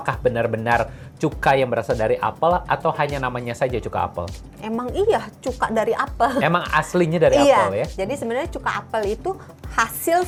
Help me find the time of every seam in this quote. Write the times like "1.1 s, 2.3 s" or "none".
none

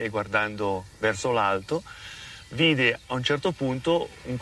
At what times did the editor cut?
1.6 s

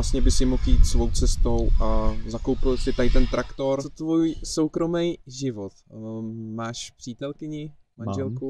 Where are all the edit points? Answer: 3.9 s

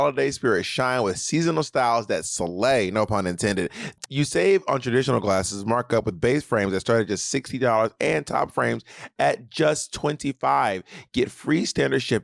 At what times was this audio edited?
3.9 s

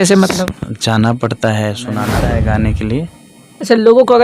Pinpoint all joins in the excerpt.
2.1 s

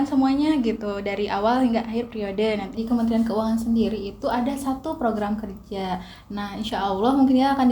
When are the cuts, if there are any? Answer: 2.8 s

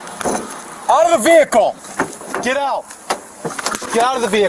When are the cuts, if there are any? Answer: 1.8 s, 3.3 s

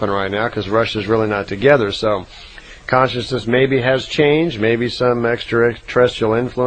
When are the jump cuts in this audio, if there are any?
none

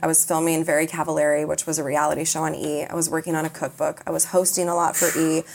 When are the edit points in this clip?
none

